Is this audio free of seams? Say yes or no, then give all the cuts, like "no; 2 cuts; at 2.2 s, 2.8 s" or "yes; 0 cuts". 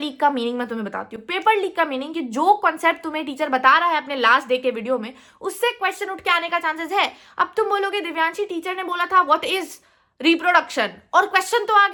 yes; 0 cuts